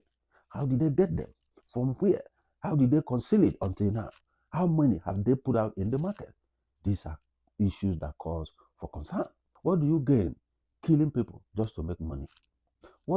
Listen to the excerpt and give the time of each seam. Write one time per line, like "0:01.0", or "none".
0:09.5